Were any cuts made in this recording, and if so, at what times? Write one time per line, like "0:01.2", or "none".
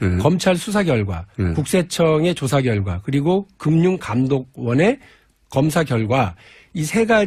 none